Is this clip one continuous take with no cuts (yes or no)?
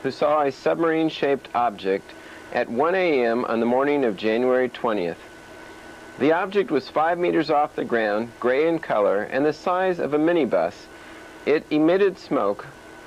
yes